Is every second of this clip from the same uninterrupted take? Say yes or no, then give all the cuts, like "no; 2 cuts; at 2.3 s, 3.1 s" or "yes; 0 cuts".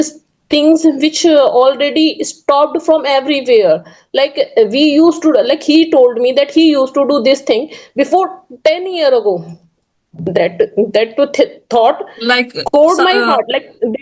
yes; 0 cuts